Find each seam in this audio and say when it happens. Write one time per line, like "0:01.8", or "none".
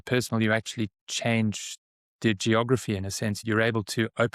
0:03.4